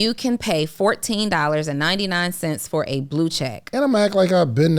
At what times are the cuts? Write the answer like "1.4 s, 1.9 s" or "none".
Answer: 3.6 s

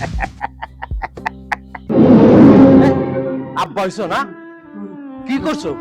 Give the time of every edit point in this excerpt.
1.9 s, 3.5 s

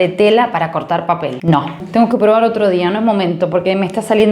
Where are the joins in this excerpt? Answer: 1.8 s

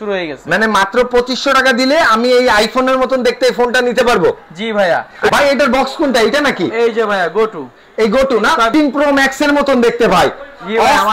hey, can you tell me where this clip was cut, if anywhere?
5.3 s, 8.7 s

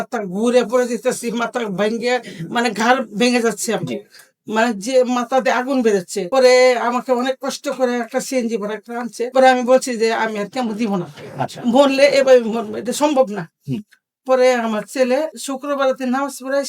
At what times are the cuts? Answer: none

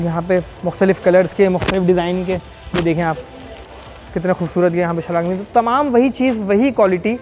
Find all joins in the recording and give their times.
none

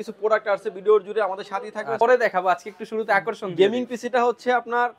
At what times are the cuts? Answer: 2.0 s

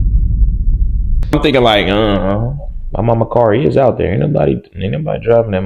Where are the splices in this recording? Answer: 1.2 s

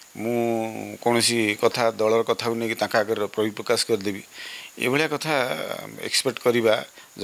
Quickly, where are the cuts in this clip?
none

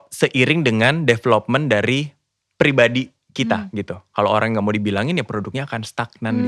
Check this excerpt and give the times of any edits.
none

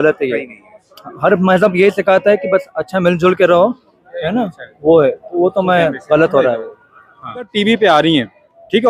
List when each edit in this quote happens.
7.5 s

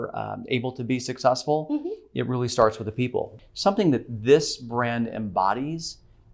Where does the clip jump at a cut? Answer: 3.4 s

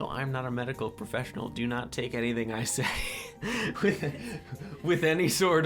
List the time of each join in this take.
none

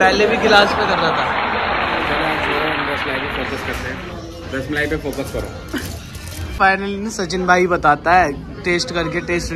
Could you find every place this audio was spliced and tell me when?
none

